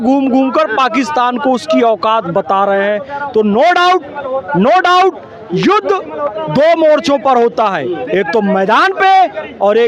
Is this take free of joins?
yes; 0 cuts

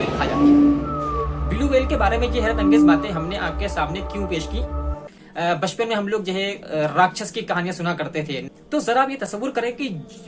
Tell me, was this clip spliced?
yes; 2 cuts; at 5.2 s, 8.4 s

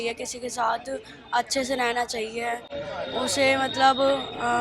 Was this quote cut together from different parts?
no; 0 cuts

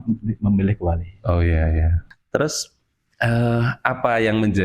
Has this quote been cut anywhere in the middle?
no; 0 cuts

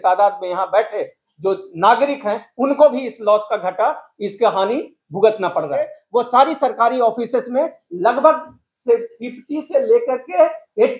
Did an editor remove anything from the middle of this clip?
yes; 1 cut; at 6.0 s

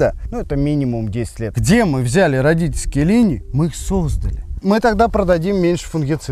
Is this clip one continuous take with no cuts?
no; 2 cuts; at 1.6 s, 4.5 s

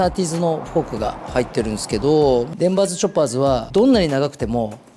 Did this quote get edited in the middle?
yes; 2 cuts; at 2.5 s, 3.7 s

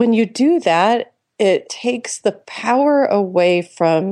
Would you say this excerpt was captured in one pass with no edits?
no; 1 cut; at 1.7 s

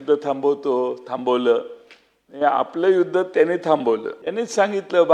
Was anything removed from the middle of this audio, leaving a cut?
yes; 1 cut; at 4.2 s

